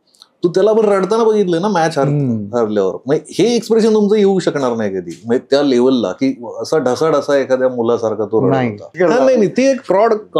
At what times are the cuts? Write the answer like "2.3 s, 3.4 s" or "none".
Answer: 8.9 s